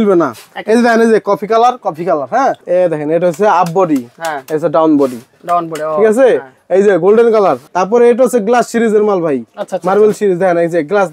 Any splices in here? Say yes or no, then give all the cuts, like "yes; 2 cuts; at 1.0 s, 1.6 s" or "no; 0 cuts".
yes; 2 cuts; at 2.6 s, 7.6 s